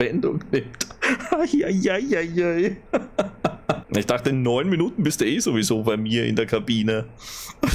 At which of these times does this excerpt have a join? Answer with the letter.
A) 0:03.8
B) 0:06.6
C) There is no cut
A